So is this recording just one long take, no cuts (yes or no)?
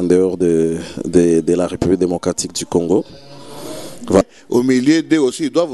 no